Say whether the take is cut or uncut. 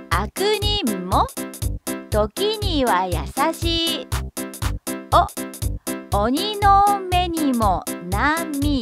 cut